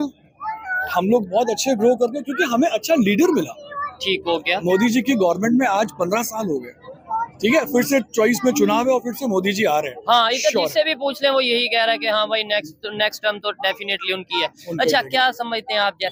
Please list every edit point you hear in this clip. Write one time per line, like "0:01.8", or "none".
none

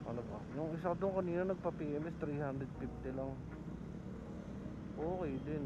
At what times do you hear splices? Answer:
none

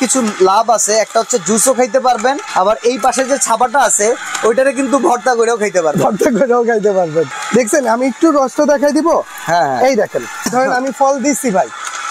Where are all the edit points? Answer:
0:02.4
0:07.4
0:10.5

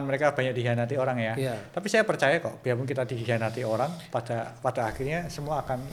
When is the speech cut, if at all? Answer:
none

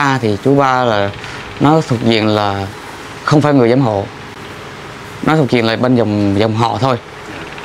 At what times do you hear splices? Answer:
none

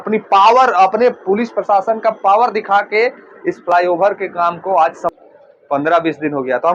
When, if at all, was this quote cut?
0:05.2

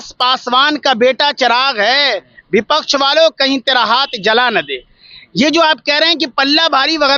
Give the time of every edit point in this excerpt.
none

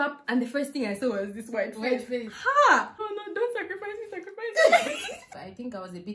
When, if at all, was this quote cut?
0:03.0
0:05.4

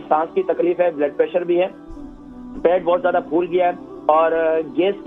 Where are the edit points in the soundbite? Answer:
none

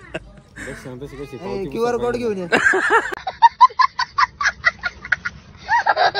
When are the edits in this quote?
none

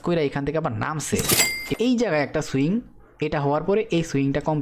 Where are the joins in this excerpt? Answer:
0:01.6

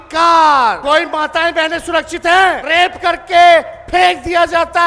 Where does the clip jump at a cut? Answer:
0:00.8
0:02.6

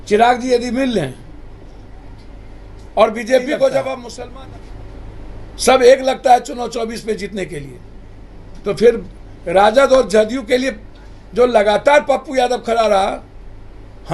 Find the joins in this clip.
0:04.1

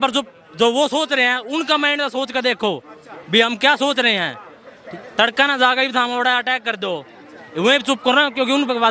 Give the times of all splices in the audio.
none

